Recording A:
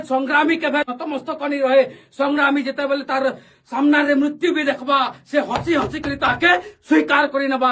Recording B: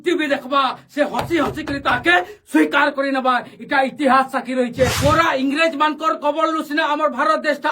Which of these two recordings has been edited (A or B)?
B